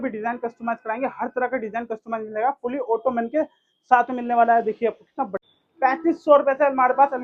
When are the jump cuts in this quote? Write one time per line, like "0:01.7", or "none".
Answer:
0:05.3